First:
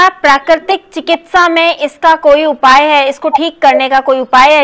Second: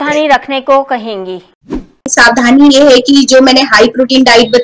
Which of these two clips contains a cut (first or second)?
second